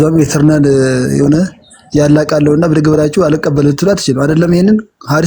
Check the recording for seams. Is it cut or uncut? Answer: uncut